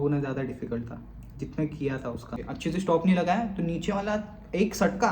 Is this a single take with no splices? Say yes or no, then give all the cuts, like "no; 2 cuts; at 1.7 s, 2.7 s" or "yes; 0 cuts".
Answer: no; 1 cut; at 2.4 s